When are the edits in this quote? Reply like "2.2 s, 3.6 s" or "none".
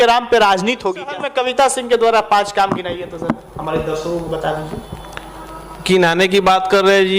1.2 s